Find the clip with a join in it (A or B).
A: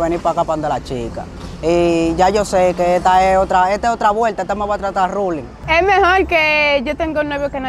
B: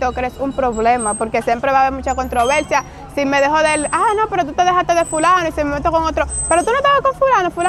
A